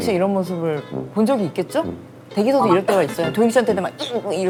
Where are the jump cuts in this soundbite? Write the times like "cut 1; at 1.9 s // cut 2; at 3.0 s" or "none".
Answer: none